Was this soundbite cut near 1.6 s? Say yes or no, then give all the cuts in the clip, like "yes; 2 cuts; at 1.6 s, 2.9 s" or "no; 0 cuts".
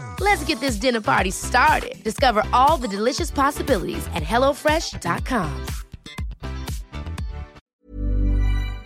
no; 1 cut; at 7.7 s